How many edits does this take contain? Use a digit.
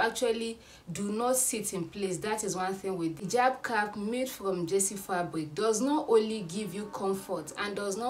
1